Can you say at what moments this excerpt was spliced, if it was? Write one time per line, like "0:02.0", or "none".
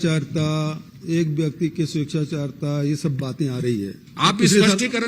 0:04.0